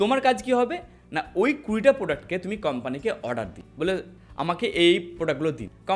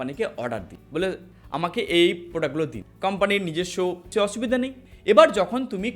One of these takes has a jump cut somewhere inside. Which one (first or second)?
second